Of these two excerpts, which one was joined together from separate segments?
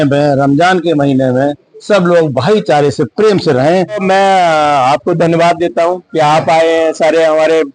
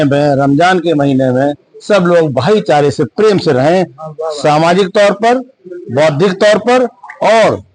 first; 1 cut; at 4.0 s

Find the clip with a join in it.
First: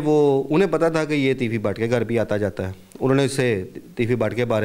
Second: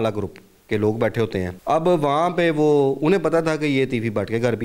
second; 1 cut; at 1.5 s

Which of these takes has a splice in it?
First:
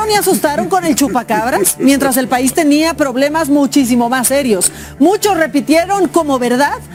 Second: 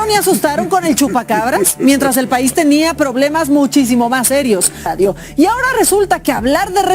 second; 1 cut; at 4.9 s

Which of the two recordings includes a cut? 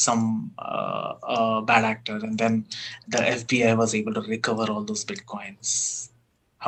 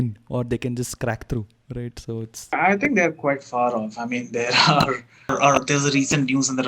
second; 1 cut; at 5.3 s

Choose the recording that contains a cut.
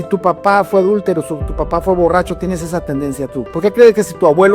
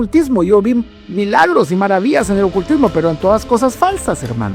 first; 1 cut; at 3.4 s

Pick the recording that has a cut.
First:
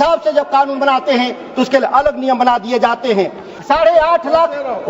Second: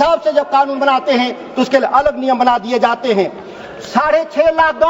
first; 1 cut; at 3.5 s

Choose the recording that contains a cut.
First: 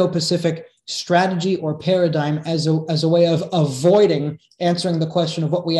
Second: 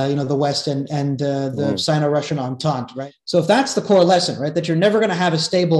second; 1 cut; at 3.0 s

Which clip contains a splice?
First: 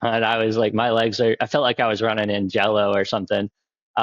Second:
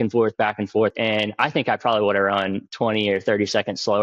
second; 1 cut; at 0.9 s

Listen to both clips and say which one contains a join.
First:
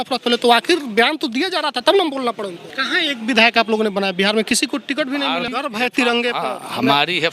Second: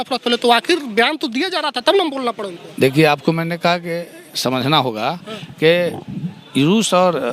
first; 2 cuts; at 2.6 s, 5.5 s

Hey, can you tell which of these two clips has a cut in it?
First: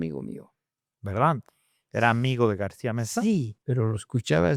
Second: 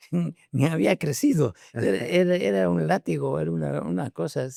first; 1 cut; at 3.6 s

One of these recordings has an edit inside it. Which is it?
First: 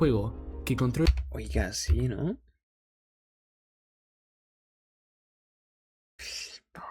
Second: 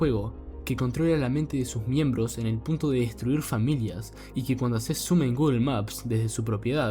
second; 1 cut; at 1.1 s

